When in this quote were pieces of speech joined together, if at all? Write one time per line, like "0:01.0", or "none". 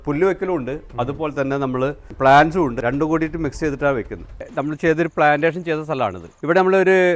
0:02.1
0:02.8
0:04.4
0:06.3